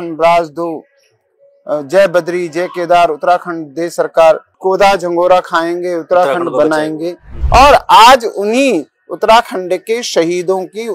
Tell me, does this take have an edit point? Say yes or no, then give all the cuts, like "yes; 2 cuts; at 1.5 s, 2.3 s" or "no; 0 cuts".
yes; 1 cut; at 7.3 s